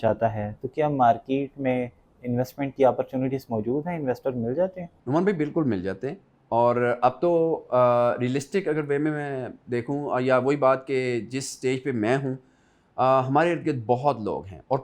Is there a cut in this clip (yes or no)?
yes